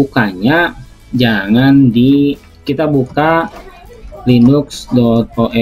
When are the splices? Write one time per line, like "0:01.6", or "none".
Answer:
0:02.5

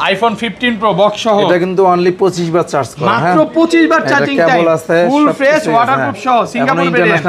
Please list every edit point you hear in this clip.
none

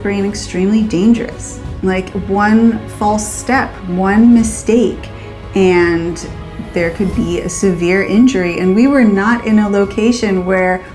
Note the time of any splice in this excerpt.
0:01.6

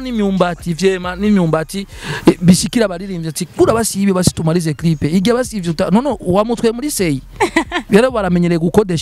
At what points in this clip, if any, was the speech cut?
0:07.8

